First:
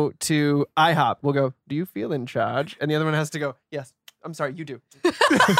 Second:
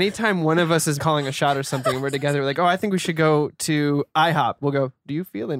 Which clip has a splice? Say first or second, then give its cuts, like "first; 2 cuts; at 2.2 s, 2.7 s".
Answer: second; 1 cut; at 1.0 s